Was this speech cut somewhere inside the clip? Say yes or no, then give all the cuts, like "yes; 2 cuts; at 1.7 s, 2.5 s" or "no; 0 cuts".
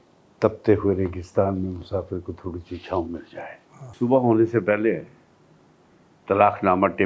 yes; 1 cut; at 3.9 s